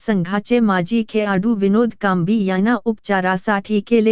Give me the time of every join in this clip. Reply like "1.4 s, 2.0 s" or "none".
2.8 s